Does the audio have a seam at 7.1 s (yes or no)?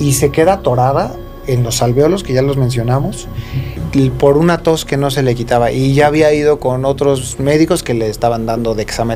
no